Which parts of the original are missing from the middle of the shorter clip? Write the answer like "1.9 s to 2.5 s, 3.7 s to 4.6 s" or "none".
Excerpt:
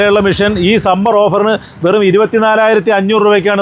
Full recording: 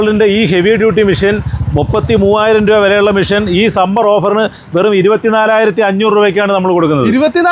none